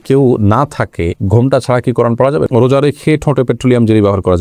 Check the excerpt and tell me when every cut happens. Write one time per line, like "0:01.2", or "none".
0:02.5